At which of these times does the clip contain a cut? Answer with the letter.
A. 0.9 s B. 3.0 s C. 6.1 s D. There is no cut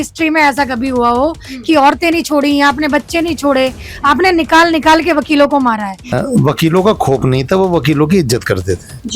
C